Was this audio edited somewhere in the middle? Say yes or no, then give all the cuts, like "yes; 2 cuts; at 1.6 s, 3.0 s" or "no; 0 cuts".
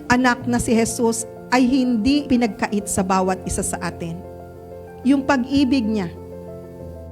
yes; 1 cut; at 2.2 s